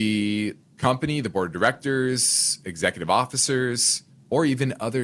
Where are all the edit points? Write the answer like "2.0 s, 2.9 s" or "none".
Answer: none